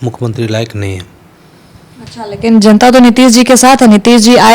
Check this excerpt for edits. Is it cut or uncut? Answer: uncut